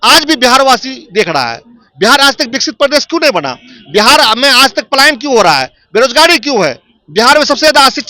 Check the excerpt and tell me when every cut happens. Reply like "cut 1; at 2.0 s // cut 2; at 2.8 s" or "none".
cut 1; at 2.5 s